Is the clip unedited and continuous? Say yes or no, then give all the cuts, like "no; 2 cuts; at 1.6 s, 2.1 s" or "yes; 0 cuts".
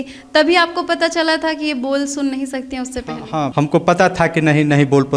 no; 1 cut; at 3.5 s